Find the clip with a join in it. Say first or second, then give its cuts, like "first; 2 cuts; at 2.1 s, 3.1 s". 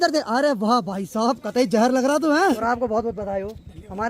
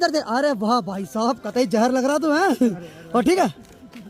first; 1 cut; at 2.6 s